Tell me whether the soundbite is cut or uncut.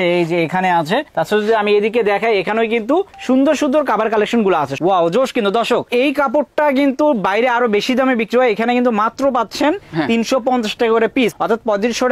cut